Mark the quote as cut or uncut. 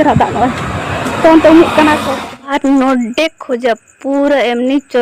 cut